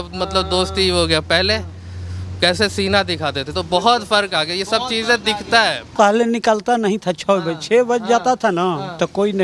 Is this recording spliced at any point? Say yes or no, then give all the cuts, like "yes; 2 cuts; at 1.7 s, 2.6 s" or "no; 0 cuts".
yes; 1 cut; at 5.8 s